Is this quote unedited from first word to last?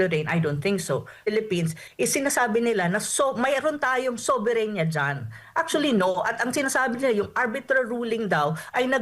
no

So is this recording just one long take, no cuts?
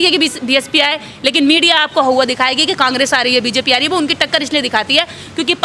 yes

